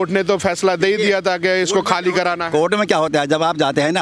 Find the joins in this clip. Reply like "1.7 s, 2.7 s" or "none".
none